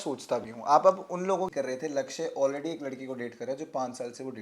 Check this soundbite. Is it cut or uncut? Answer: cut